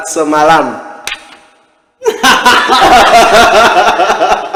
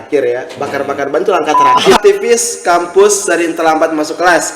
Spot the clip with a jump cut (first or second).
second